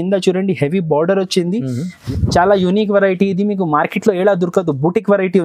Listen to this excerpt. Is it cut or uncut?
cut